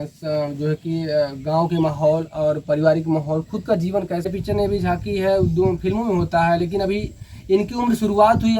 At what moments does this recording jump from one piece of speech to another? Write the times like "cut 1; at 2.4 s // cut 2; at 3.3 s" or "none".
cut 1; at 4.3 s